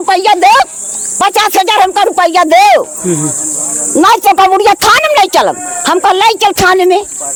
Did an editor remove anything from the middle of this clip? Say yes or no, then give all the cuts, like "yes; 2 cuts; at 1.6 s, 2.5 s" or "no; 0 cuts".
no; 0 cuts